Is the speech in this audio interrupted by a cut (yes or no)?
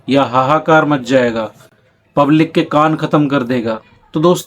no